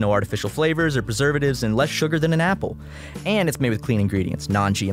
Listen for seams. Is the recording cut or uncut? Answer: uncut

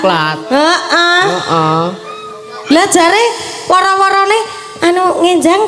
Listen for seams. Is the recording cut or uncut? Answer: uncut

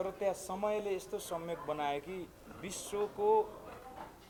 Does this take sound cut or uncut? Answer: uncut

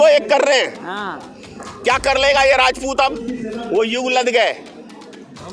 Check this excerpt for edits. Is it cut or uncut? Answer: uncut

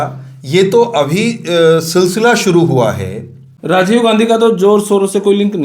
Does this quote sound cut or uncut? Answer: cut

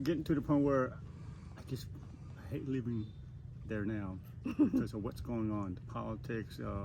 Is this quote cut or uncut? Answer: uncut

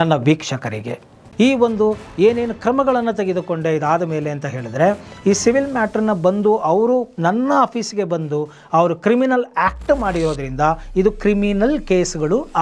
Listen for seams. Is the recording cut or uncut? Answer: cut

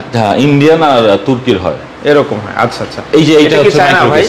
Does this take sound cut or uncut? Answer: uncut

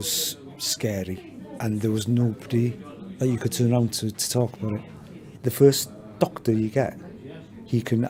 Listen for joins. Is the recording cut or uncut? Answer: uncut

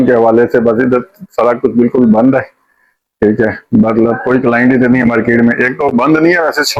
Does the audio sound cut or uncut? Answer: uncut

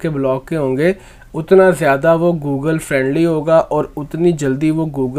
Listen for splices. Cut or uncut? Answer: uncut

